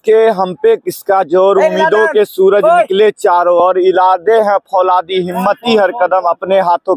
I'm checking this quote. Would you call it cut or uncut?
uncut